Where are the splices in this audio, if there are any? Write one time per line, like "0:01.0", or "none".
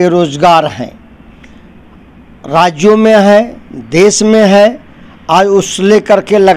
none